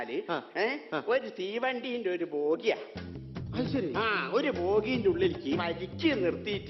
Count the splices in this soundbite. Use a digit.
1